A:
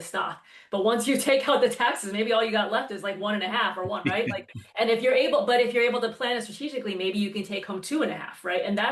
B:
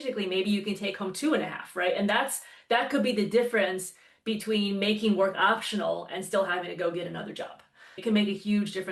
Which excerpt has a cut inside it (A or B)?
B